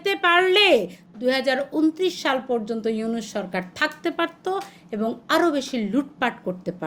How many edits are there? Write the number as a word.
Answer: one